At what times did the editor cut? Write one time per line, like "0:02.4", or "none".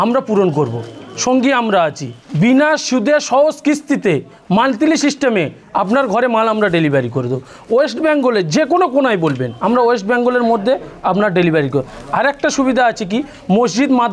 0:09.5

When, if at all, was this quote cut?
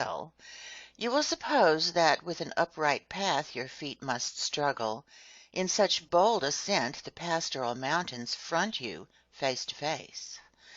0:03.3

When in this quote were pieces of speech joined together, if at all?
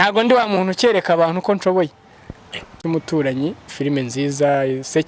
0:02.8
0:03.7

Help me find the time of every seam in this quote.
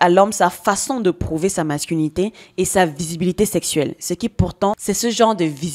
0:04.8

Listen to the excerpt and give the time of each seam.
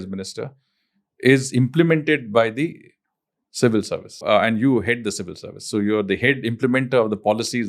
0:04.2

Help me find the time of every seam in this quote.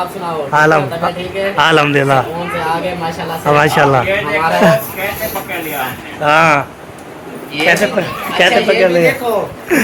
none

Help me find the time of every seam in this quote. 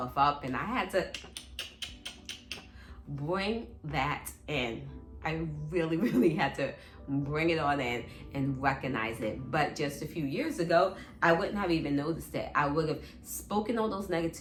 none

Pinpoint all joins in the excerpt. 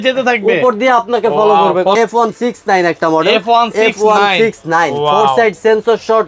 0:01.9

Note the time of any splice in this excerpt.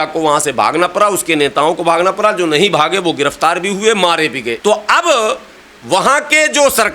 0:04.5

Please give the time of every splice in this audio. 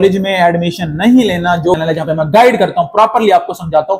0:01.8

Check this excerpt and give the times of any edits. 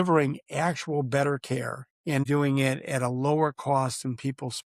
0:02.2

